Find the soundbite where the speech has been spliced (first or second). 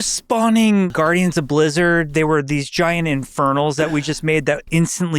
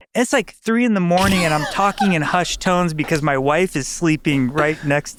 first